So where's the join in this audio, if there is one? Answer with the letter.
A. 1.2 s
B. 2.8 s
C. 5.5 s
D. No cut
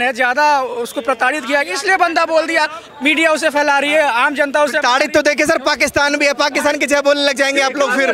B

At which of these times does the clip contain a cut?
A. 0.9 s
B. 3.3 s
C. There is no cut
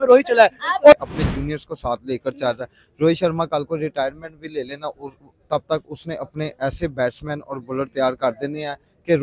A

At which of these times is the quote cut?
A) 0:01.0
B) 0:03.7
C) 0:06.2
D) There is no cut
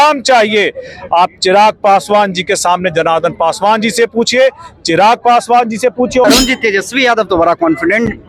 C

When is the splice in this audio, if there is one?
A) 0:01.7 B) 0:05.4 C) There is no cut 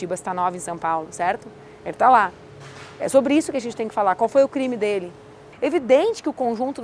B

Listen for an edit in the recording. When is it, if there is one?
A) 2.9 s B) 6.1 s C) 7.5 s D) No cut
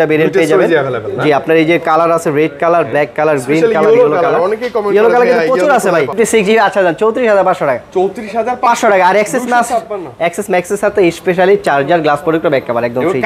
B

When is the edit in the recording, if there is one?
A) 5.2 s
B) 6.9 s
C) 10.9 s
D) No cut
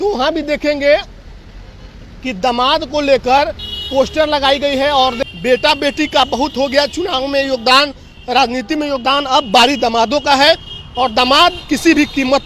A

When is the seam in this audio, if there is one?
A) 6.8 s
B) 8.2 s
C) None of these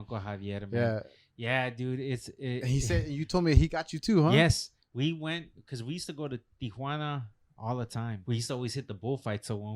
B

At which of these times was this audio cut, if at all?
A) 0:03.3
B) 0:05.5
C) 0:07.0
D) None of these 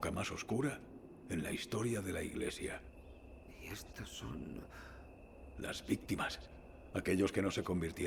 D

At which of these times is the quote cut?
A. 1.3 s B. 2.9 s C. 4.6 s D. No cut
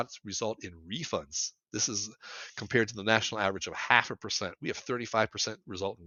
D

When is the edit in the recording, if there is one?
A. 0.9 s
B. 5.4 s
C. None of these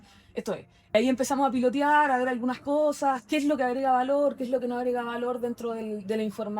A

